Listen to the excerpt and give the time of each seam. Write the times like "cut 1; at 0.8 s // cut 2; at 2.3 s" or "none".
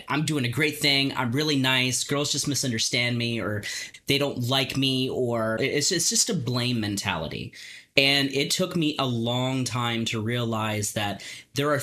cut 1; at 3.8 s // cut 2; at 5.6 s